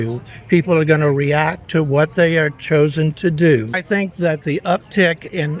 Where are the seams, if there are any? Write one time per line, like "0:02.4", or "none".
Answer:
0:03.7